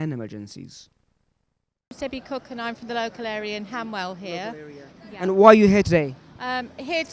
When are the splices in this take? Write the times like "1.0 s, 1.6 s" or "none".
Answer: 5.5 s